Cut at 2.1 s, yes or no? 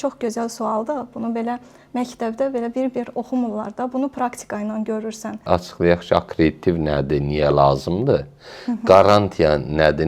no